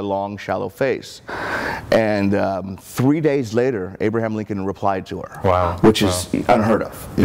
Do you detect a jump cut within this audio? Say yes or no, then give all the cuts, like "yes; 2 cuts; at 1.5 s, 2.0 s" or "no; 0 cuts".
no; 0 cuts